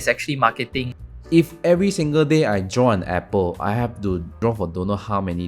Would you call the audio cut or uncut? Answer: cut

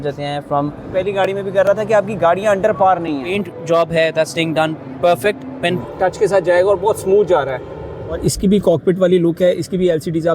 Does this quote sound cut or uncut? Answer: cut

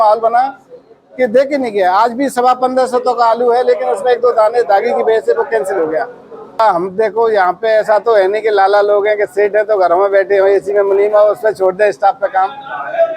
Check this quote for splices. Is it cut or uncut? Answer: cut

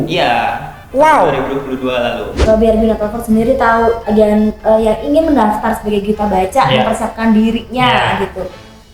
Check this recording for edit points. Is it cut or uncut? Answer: cut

